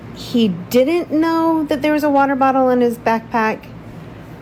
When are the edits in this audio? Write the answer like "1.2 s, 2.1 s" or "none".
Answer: none